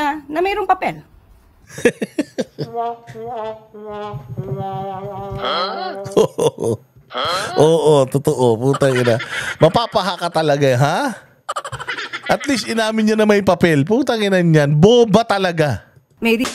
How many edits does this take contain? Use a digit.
0